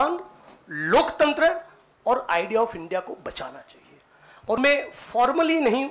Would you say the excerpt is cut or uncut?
cut